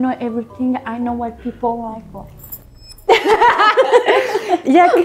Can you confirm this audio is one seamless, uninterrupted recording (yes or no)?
yes